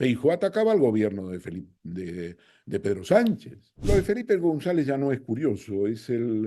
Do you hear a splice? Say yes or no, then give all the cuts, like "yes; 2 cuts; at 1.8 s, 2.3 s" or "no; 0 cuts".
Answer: yes; 1 cut; at 3.8 s